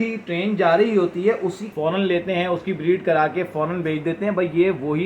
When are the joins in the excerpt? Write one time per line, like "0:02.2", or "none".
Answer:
0:01.7